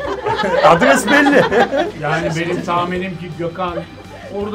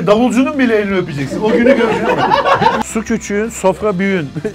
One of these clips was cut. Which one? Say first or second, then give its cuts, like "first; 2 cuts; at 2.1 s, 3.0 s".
second; 1 cut; at 2.8 s